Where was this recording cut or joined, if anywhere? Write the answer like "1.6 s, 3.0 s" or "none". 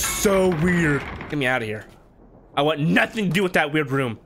1.3 s

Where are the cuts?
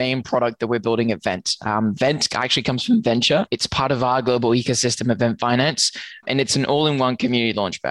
3.5 s, 6.2 s

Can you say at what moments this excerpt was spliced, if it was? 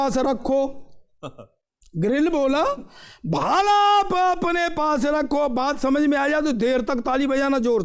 none

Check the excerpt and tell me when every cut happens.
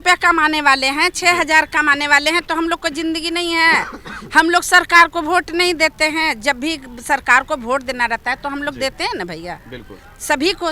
none

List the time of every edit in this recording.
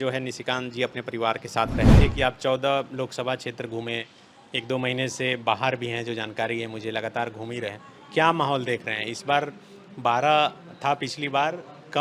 2.0 s

